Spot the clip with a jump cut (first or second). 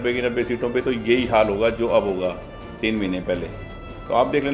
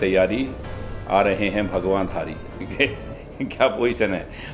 second